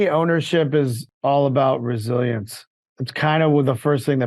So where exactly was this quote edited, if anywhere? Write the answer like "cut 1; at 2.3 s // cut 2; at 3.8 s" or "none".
cut 1; at 1.0 s